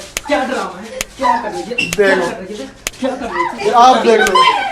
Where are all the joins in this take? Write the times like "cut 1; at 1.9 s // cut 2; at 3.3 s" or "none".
cut 1; at 3.5 s